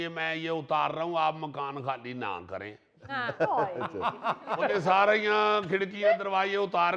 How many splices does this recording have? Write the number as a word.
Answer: one